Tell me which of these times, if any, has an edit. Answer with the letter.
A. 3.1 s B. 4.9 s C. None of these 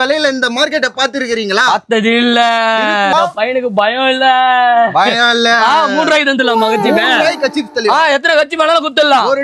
A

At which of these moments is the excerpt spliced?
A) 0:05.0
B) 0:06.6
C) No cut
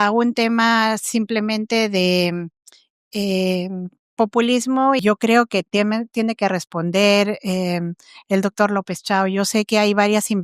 A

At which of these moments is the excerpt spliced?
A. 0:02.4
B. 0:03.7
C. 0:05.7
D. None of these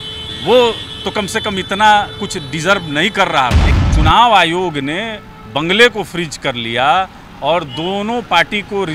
B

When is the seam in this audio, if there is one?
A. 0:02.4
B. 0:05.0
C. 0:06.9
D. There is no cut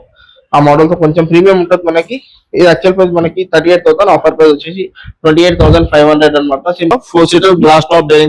C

